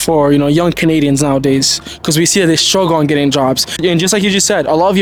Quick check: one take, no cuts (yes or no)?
yes